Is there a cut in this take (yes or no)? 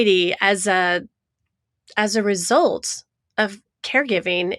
no